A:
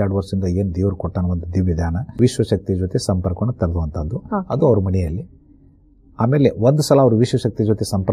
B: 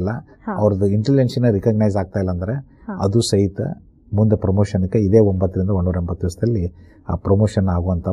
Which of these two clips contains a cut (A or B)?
A